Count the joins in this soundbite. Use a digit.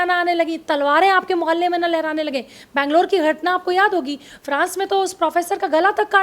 0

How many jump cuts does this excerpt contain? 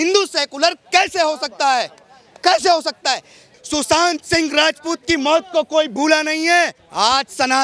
2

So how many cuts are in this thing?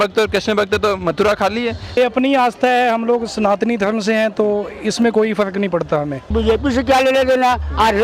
2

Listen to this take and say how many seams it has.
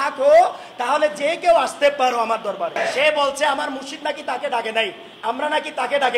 1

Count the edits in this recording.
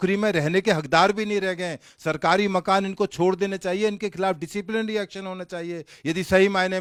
0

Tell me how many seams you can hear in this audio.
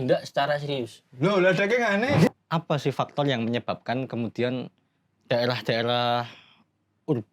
1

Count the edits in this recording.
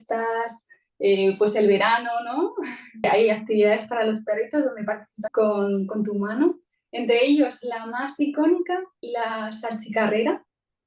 2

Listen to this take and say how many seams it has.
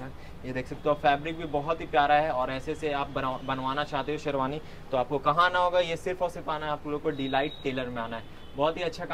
0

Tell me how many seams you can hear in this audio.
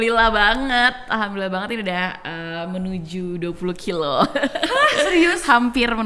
0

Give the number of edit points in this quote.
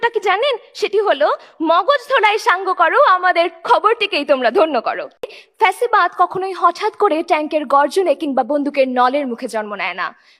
1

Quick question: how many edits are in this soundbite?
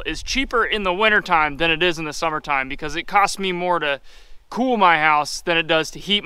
0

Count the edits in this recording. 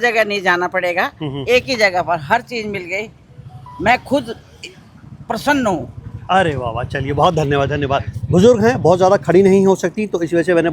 0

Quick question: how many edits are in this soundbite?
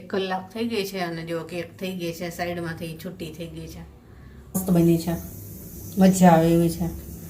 1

